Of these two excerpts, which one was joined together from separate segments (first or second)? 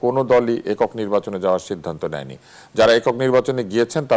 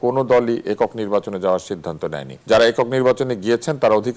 second